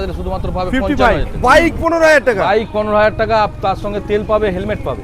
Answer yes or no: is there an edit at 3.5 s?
no